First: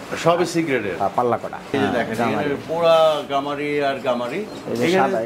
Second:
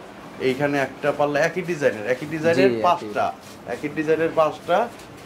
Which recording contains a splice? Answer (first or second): first